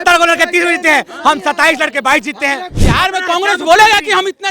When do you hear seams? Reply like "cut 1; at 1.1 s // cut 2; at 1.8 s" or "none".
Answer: cut 1; at 2.7 s